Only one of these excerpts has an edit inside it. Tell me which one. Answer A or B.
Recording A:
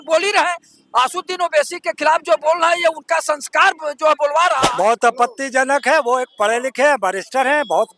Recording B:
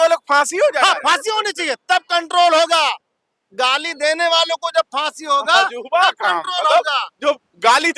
A